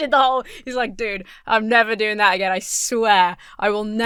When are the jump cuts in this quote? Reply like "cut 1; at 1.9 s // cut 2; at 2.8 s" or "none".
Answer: none